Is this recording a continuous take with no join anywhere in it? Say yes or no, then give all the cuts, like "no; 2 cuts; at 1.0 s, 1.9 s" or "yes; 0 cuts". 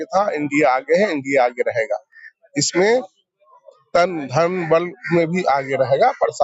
yes; 0 cuts